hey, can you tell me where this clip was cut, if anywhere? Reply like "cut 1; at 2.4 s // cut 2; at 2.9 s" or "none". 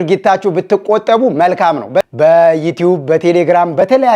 cut 1; at 2.1 s